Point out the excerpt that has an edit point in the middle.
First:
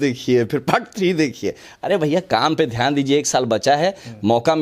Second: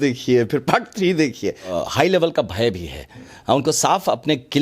second; 1 cut; at 1.7 s

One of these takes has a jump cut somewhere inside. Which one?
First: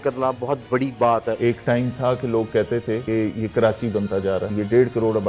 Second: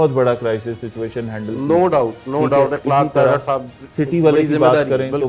first; 3 cuts; at 1.3 s, 3.0 s, 4.5 s

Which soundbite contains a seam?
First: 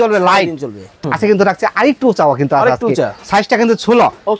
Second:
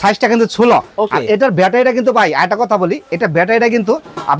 first; 1 cut; at 0.9 s

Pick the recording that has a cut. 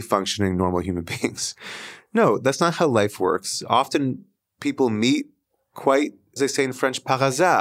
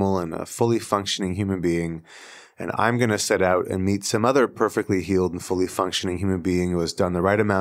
first; 1 cut; at 6.2 s

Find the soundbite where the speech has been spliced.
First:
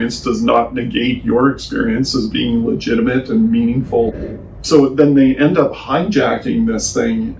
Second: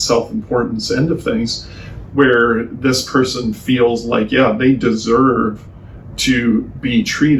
first; 1 cut; at 4.2 s

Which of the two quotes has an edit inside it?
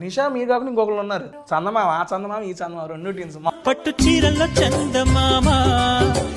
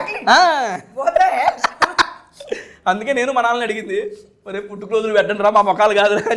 first; 2 cuts; at 1.3 s, 3.5 s

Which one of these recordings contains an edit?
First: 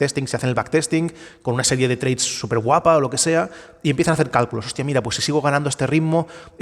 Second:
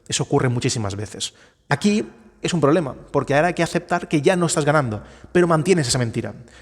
second; 1 cut; at 1.7 s

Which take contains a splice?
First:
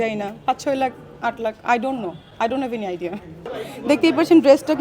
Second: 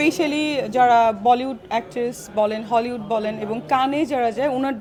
first; 1 cut; at 3.6 s

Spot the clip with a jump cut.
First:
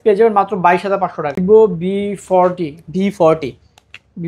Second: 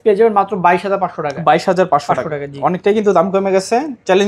first; 1 cut; at 1.4 s

